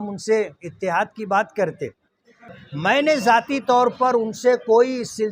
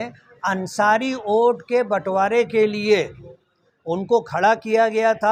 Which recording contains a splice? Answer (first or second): first